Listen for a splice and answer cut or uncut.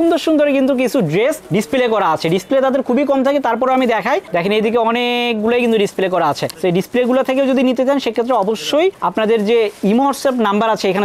uncut